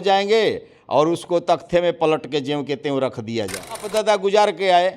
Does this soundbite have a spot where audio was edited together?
yes; 1 cut; at 3.9 s

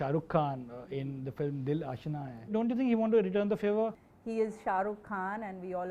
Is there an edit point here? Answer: yes; 2 cuts; at 2.5 s, 4.0 s

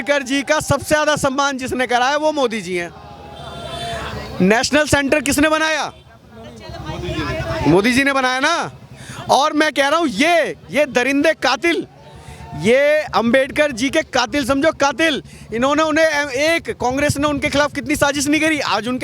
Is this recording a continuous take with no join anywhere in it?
yes; 0 cuts

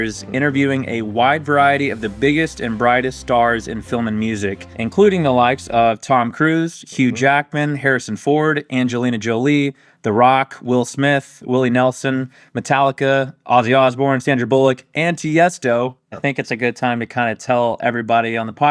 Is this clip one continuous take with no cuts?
no; 2 cuts; at 4.7 s, 16.1 s

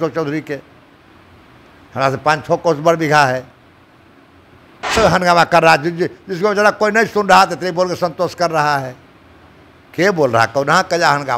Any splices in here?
yes; 1 cut; at 4.8 s

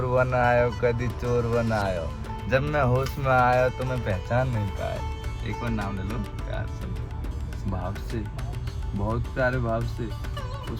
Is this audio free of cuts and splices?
no; 1 cut; at 5.0 s

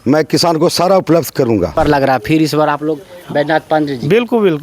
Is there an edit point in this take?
yes; 1 cut; at 1.8 s

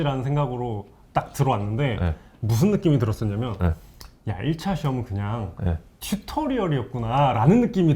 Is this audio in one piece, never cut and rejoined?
yes; 0 cuts

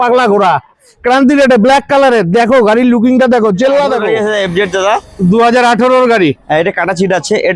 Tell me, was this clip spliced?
yes; 1 cut; at 4.0 s

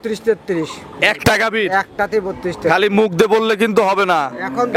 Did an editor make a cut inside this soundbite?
no; 0 cuts

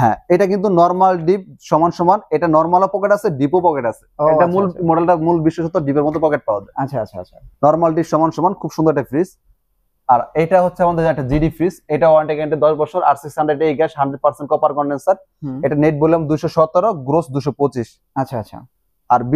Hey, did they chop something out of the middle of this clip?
no; 0 cuts

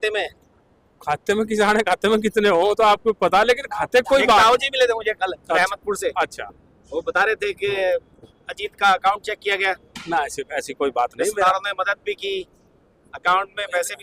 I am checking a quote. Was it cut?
no; 0 cuts

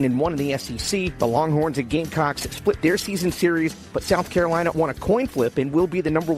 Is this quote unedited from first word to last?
yes; 0 cuts

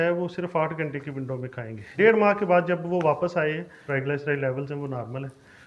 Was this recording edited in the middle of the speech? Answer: yes; 2 cuts; at 1.9 s, 3.8 s

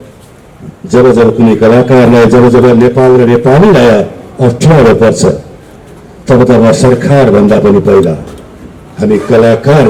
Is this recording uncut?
yes; 0 cuts

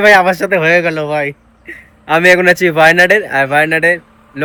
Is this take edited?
no; 0 cuts

